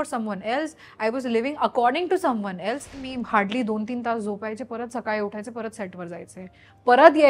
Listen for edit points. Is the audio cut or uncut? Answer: cut